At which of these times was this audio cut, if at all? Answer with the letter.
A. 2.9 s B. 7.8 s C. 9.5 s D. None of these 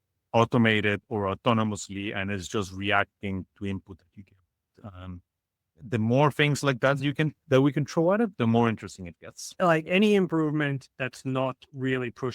C